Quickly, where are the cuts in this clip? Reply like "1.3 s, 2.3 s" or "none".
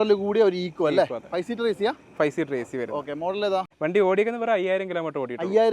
3.7 s